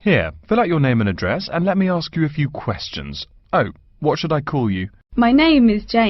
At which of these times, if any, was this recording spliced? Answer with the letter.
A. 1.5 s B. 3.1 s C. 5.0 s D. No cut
C